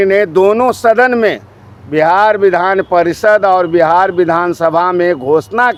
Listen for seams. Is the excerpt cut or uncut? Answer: uncut